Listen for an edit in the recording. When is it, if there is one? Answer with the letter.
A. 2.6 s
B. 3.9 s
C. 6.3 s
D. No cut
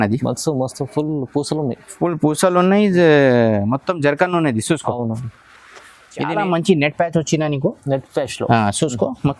C